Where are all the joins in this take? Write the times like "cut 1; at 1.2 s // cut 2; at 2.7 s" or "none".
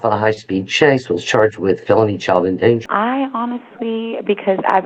cut 1; at 2.8 s